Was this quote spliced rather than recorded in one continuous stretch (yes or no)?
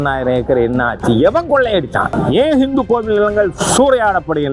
yes